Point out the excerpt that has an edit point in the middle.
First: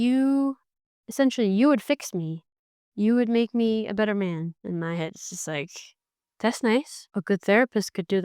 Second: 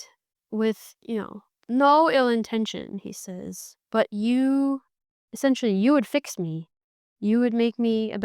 first; 1 cut; at 7.0 s

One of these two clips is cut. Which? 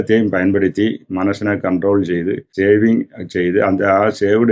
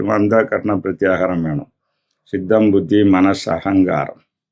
first; 1 cut; at 2.6 s

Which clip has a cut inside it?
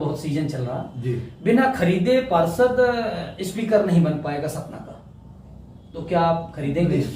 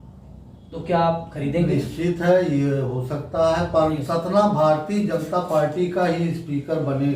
second; 1 cut; at 4.0 s

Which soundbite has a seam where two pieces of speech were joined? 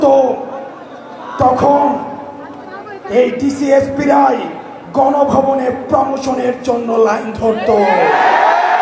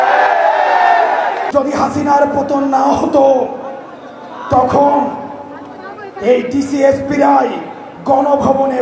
second; 1 cut; at 1.5 s

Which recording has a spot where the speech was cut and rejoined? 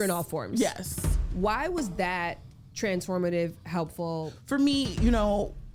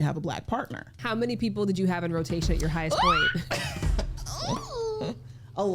second; 1 cut; at 0.9 s

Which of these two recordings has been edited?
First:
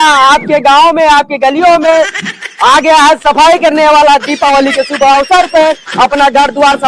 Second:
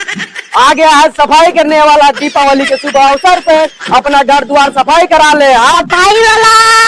second; 1 cut; at 5.8 s

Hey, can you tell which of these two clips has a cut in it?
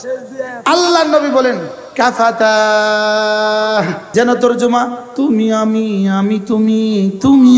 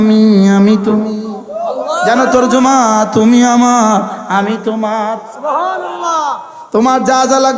first; 1 cut; at 4.0 s

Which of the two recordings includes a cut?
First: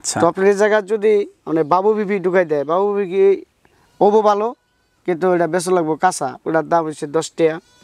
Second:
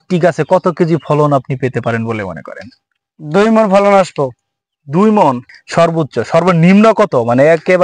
second; 1 cut; at 5.5 s

